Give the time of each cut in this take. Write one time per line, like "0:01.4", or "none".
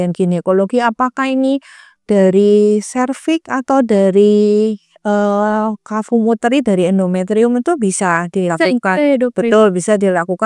none